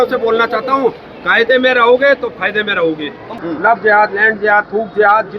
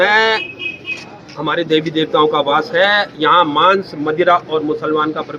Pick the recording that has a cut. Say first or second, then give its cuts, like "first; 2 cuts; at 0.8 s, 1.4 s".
first; 1 cut; at 3.4 s